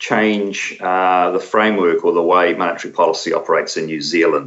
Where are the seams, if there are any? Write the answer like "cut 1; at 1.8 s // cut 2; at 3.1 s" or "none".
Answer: none